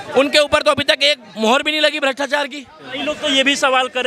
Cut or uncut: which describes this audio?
cut